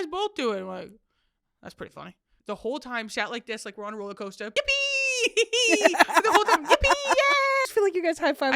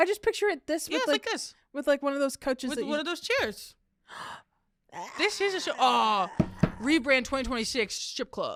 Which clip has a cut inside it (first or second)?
first